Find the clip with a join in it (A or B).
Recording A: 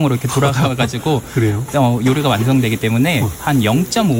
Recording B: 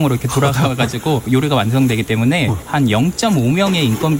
B